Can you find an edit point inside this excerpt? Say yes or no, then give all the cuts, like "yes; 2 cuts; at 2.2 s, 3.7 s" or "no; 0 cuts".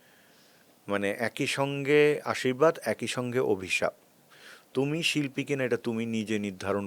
no; 0 cuts